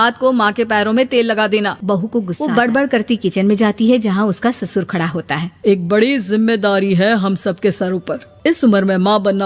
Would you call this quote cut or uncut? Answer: cut